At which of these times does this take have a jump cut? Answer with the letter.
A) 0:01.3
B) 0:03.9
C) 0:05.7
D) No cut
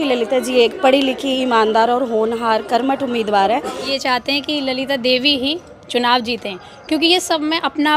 B